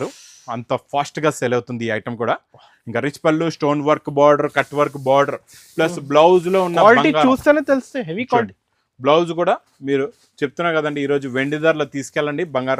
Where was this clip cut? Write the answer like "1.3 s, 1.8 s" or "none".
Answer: none